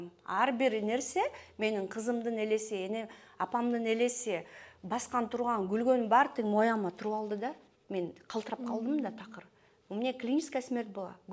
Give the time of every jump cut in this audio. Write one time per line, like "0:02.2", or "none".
none